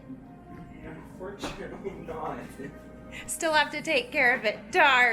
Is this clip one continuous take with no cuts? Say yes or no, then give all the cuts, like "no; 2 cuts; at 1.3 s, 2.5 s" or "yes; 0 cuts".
yes; 0 cuts